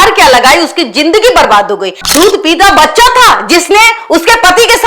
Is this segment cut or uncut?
cut